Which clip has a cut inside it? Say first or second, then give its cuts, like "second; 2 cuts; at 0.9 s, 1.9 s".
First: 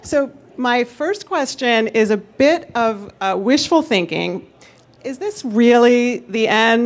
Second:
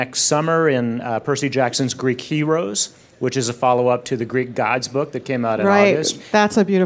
second; 1 cut; at 1.9 s